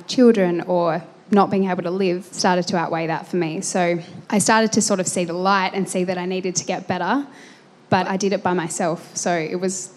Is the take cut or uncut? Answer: cut